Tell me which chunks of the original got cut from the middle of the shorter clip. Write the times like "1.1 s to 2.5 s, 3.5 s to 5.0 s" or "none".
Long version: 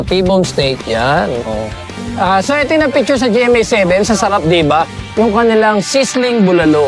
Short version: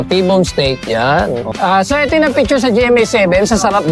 1.5 s to 2.1 s